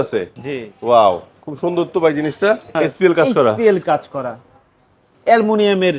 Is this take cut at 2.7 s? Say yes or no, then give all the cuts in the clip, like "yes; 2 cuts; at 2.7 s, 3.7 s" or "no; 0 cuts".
yes; 1 cut; at 2.7 s